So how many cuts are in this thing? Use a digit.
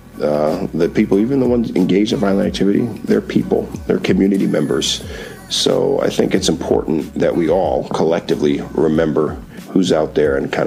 0